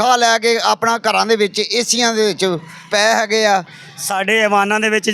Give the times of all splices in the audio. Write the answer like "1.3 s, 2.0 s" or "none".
3.4 s